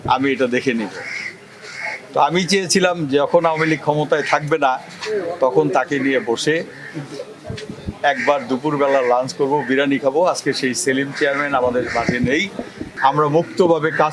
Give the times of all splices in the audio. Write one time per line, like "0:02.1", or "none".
0:12.9